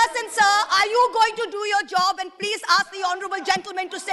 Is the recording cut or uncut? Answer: uncut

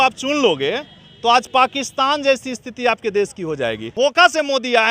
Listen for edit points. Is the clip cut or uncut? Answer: cut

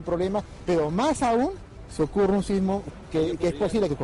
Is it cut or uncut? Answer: cut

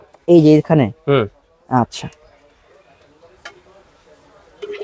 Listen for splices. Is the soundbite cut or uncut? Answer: uncut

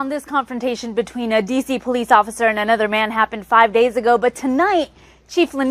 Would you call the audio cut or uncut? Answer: cut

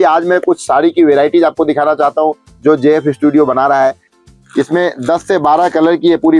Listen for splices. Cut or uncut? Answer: cut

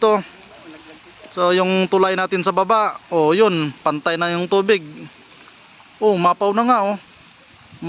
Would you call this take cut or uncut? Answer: uncut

